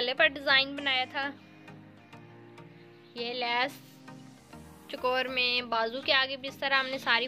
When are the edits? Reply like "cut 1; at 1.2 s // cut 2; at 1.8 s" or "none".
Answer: none